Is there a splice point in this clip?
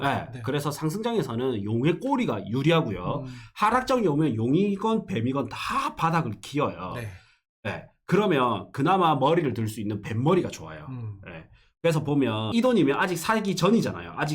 yes; 1 cut; at 12.5 s

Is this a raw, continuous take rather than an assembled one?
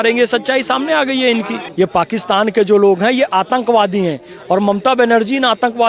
no; 1 cut; at 1.6 s

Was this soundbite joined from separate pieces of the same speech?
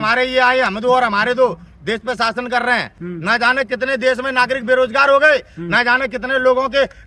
yes; 1 cut; at 3.0 s

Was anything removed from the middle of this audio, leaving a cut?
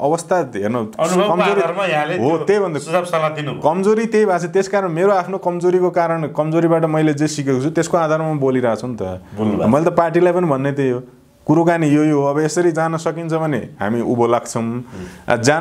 no; 0 cuts

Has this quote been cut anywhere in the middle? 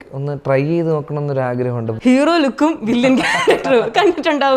yes; 1 cut; at 1.9 s

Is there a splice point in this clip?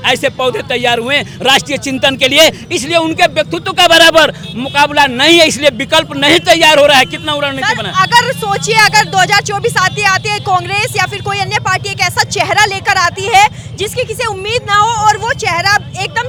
no; 0 cuts

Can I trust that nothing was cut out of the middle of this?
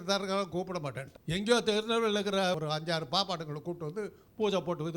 no; 2 cuts; at 1.1 s, 2.6 s

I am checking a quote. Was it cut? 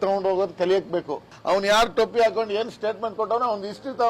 yes; 1 cut; at 1.3 s

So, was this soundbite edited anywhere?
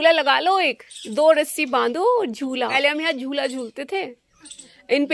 yes; 1 cut; at 2.7 s

